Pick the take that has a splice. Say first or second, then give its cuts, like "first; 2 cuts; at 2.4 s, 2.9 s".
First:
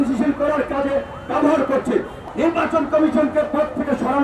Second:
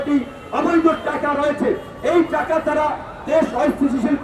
first; 1 cut; at 2.2 s